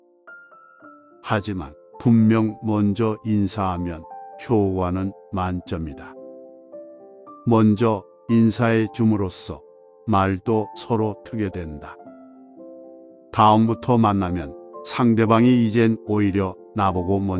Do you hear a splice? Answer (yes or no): no